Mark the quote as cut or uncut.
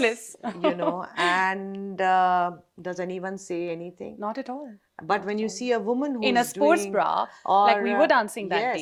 uncut